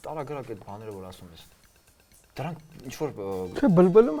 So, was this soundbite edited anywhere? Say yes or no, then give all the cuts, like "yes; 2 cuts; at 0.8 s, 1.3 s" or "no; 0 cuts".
no; 0 cuts